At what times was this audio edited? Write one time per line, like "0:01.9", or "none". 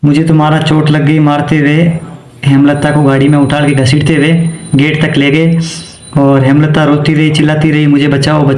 none